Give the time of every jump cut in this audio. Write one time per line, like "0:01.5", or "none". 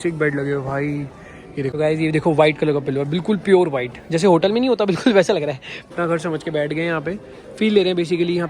0:01.7
0:05.9